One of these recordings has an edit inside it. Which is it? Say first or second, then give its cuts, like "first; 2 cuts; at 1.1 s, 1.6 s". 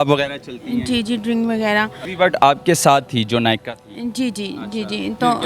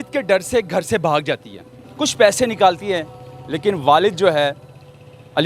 first; 1 cut; at 2.0 s